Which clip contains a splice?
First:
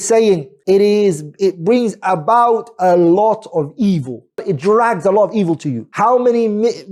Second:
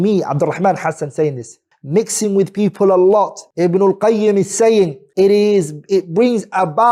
first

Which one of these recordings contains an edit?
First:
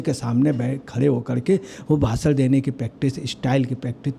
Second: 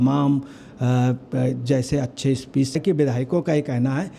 second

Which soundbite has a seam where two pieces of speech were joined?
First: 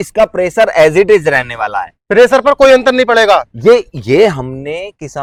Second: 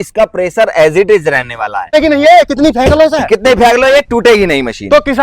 second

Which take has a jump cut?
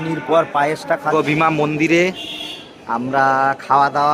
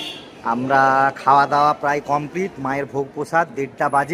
first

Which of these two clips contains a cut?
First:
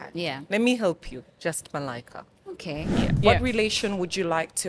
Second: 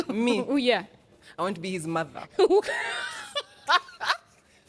first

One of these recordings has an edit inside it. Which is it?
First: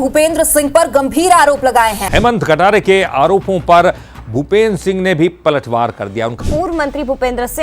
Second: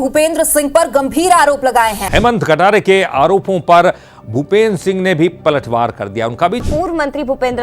first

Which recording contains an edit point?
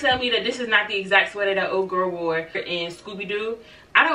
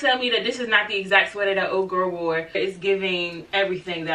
second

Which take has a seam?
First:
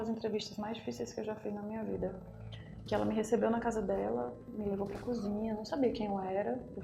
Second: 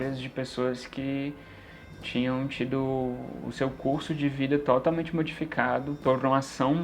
second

